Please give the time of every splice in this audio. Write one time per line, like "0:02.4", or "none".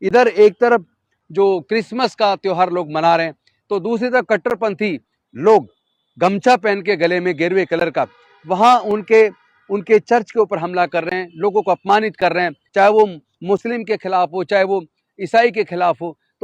0:12.6